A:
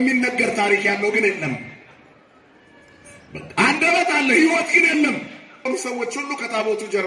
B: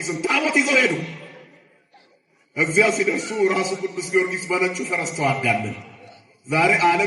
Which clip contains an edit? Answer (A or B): A